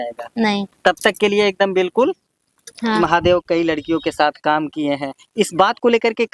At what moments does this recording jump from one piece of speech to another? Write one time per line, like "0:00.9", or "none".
0:03.0